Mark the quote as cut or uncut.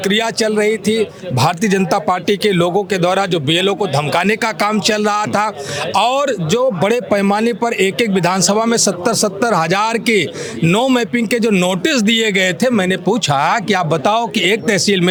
uncut